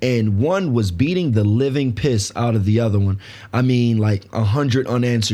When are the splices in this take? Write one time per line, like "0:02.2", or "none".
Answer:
none